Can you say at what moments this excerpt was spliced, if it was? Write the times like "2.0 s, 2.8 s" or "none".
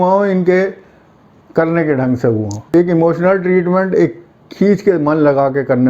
2.6 s